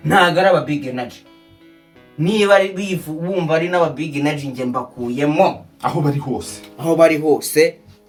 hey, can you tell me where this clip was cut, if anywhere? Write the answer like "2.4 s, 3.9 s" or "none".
none

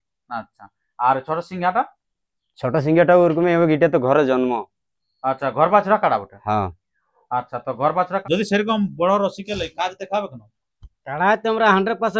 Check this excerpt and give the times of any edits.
8.2 s

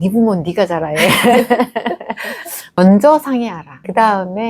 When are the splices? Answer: 2.8 s

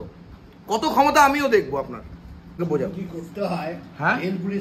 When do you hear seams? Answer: 2.6 s

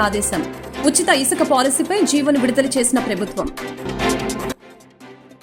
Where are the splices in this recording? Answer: none

